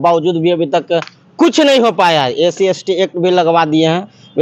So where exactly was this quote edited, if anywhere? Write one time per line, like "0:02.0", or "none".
none